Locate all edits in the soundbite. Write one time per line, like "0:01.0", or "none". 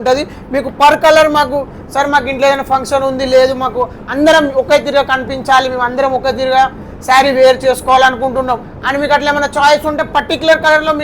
none